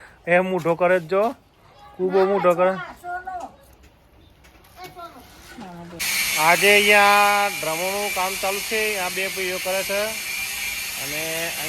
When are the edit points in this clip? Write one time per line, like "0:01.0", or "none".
0:06.0